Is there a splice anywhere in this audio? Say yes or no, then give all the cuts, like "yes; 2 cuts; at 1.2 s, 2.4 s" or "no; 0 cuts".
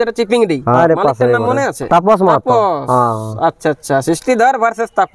yes; 2 cuts; at 0.8 s, 1.8 s